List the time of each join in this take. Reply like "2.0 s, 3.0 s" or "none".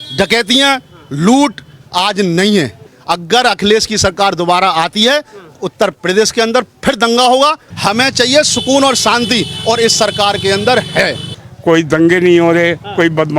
2.9 s, 7.7 s, 11.2 s